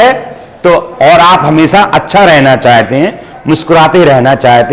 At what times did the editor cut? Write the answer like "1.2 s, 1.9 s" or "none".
none